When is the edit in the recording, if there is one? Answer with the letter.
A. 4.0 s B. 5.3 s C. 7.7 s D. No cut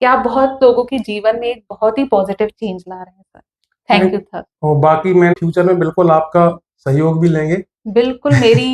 B